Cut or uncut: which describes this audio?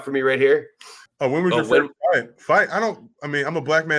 cut